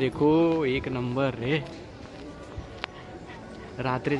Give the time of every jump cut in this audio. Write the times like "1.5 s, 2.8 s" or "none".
none